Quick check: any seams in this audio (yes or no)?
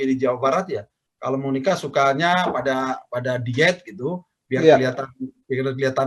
no